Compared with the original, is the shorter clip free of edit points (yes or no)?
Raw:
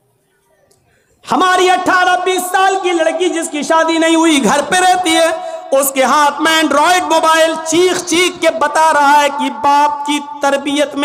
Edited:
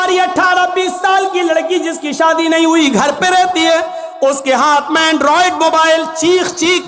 yes